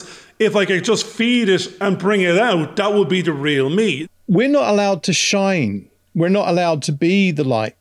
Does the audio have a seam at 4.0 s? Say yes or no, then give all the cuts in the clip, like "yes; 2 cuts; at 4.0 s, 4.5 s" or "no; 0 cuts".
yes; 1 cut; at 4.0 s